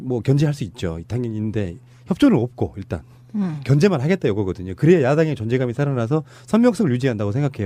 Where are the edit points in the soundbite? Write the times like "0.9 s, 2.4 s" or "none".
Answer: 2.9 s